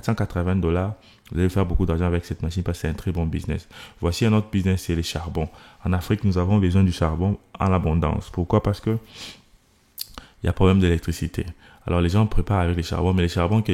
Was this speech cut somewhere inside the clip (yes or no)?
no